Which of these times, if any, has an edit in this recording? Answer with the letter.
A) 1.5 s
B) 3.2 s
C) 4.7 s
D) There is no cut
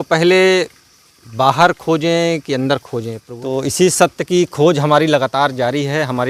B